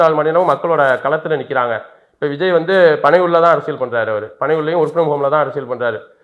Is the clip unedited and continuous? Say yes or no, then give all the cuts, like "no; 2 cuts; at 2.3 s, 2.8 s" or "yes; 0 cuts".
yes; 0 cuts